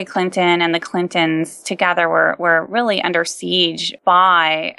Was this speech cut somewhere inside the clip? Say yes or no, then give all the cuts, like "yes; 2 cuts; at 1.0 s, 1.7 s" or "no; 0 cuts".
no; 0 cuts